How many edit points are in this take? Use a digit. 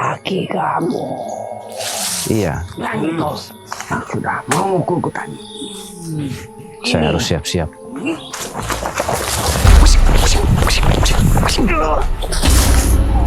1